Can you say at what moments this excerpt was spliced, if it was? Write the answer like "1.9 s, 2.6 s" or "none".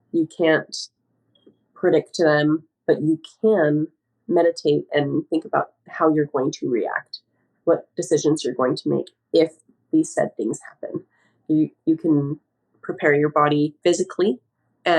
13.8 s